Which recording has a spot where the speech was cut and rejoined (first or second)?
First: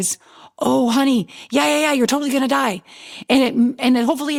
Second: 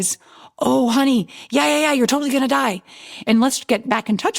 second